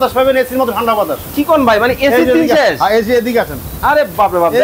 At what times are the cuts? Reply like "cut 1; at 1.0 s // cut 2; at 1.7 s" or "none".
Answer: none